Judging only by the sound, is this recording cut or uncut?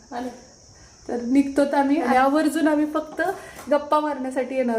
cut